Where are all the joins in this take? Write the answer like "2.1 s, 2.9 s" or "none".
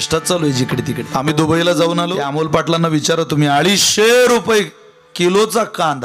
1.1 s, 2.3 s